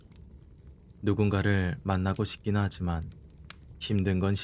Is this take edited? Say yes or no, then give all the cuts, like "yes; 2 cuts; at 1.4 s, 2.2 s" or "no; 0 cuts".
yes; 1 cut; at 1.0 s